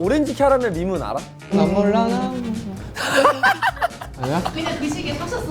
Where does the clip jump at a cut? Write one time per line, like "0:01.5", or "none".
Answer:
0:01.5